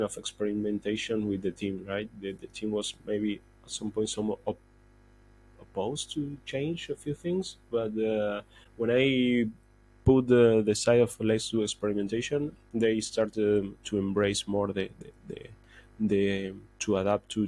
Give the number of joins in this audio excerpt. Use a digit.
0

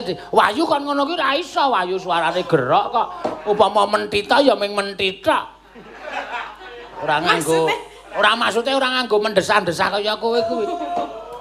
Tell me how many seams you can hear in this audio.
1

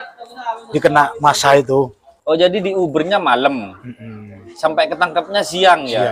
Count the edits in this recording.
1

